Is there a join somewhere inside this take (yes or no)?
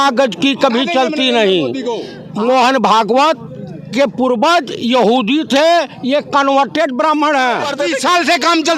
yes